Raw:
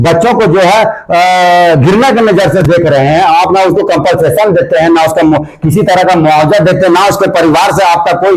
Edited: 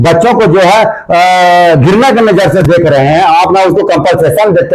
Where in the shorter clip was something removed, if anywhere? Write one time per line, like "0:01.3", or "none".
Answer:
none